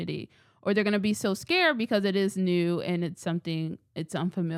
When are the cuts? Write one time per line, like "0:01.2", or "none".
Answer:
none